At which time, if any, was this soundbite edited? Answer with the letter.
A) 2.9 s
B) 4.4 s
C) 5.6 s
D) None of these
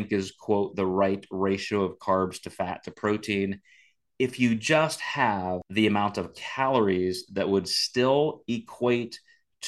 C